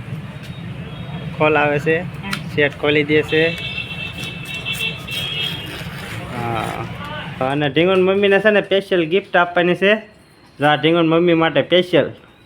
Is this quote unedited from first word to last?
no; 1 cut; at 7.4 s

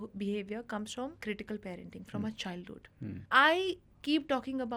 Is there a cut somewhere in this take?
yes; 2 cuts; at 1.2 s, 3.2 s

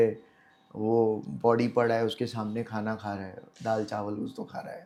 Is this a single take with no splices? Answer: yes; 0 cuts

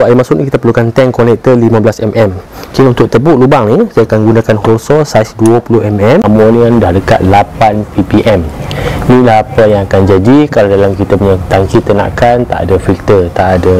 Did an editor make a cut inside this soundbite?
yes; 2 cuts; at 6.2 s, 8.7 s

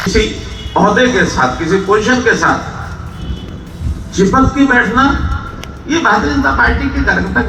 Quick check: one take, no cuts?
yes; 0 cuts

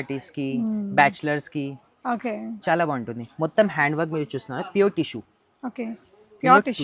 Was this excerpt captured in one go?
yes; 0 cuts

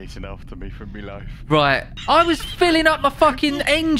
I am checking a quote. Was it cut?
yes; 1 cut; at 1.9 s

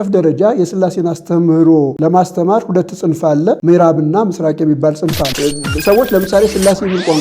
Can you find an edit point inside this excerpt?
yes; 3 cuts; at 1.9 s, 3.6 s, 5.3 s

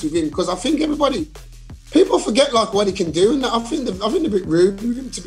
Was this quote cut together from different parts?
no; 0 cuts

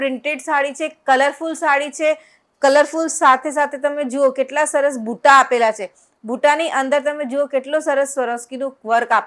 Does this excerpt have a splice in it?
no; 0 cuts

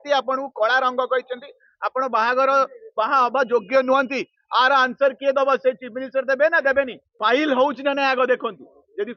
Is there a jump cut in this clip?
yes; 1 cut; at 7.0 s

